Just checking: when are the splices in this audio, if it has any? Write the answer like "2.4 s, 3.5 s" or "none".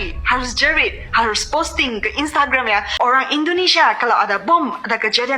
2.9 s

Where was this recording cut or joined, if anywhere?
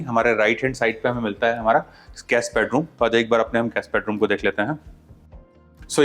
none

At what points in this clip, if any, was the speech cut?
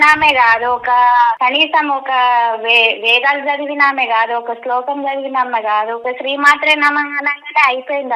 1.4 s, 6.0 s

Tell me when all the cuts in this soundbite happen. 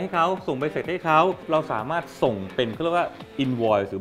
1.4 s

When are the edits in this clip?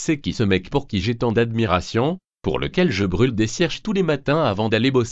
3.5 s

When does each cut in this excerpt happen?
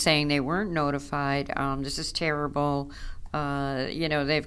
none

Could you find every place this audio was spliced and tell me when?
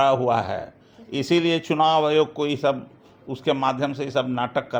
none

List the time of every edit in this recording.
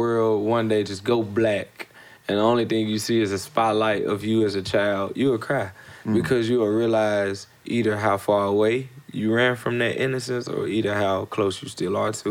none

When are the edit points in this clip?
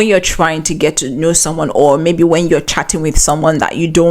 none

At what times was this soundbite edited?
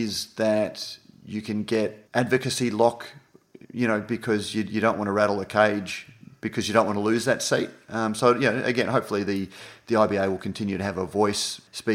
2.0 s

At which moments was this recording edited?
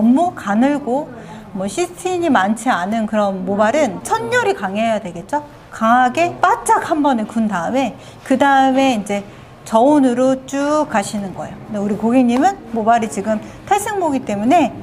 4.0 s, 6.3 s

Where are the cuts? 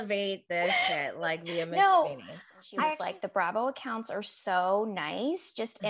3.0 s

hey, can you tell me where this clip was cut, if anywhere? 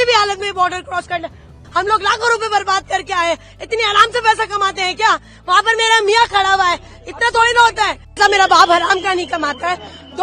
1.5 s, 8.2 s

